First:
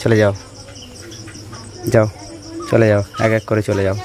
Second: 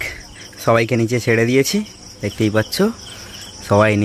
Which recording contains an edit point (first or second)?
first